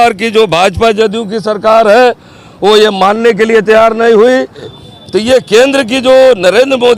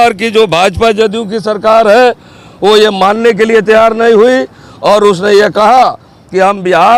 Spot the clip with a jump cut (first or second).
first